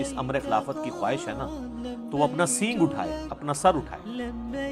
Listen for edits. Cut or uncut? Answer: uncut